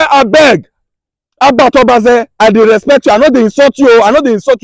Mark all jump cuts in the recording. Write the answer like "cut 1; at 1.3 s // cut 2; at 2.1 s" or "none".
none